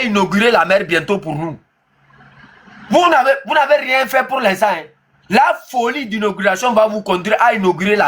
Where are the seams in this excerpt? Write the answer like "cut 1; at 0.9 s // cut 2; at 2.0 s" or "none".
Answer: none